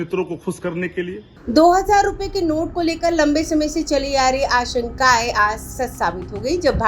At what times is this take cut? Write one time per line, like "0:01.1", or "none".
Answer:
0:01.3